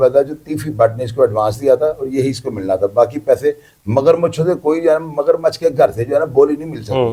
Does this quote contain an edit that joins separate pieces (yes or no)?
no